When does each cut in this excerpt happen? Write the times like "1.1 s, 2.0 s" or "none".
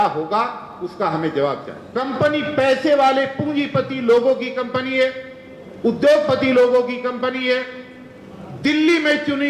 1.8 s